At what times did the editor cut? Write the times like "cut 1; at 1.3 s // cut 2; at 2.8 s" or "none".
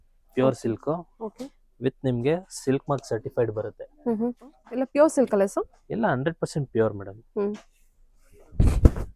cut 1; at 4.5 s